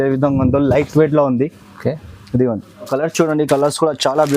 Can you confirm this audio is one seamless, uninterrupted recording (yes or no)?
no